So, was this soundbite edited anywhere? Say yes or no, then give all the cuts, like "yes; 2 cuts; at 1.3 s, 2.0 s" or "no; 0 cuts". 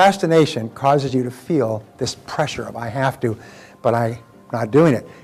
no; 0 cuts